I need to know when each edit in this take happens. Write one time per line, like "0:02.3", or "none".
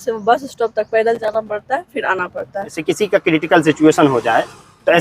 0:02.8